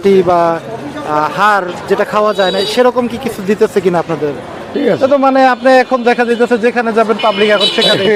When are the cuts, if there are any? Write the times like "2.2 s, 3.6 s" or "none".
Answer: 4.6 s